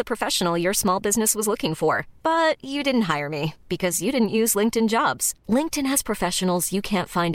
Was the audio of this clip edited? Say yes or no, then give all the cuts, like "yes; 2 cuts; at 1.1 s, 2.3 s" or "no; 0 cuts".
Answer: no; 0 cuts